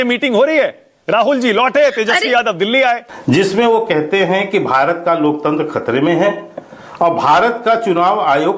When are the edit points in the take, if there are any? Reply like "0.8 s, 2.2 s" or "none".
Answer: 3.1 s